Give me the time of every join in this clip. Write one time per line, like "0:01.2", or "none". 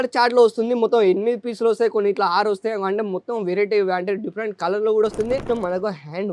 0:05.4